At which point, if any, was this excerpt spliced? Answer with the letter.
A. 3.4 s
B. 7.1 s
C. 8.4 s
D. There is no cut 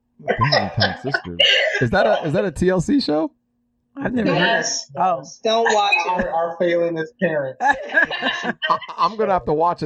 D